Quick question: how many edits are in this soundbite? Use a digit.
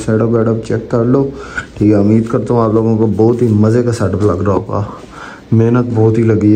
0